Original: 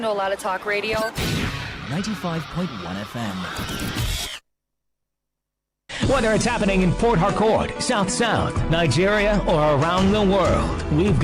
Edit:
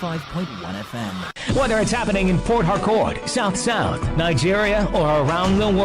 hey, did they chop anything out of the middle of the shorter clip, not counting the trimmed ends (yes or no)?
yes